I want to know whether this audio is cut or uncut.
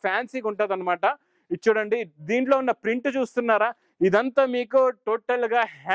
uncut